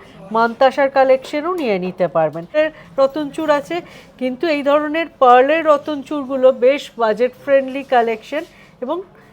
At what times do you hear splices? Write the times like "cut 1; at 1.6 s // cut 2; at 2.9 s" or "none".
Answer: cut 1; at 2.5 s